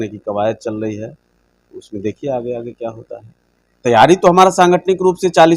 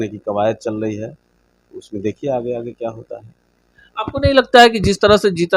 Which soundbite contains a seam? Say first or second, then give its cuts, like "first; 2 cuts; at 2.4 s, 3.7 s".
first; 1 cut; at 3.7 s